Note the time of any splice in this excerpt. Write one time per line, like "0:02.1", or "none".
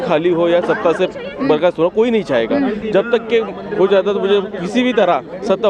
none